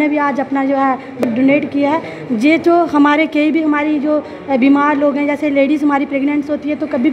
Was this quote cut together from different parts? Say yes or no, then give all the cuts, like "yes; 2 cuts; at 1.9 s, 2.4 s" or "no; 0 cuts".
yes; 1 cut; at 1.2 s